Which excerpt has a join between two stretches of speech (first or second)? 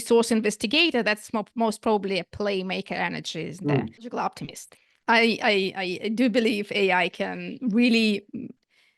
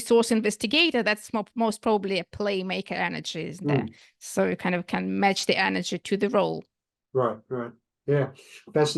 first